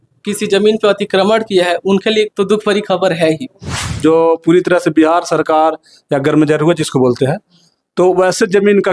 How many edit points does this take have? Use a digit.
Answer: 1